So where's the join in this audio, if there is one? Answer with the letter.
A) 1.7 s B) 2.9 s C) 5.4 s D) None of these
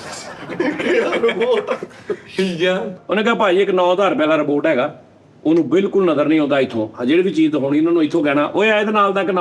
B